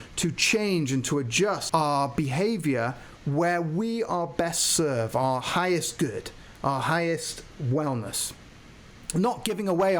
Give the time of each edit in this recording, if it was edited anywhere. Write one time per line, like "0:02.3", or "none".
0:01.6